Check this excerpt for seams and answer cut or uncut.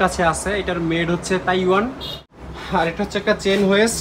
cut